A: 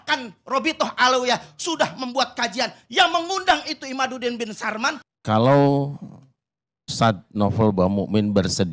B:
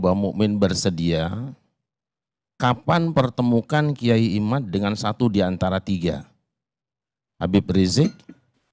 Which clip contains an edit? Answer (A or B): A